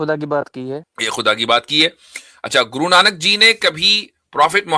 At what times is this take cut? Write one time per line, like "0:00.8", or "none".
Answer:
0:00.9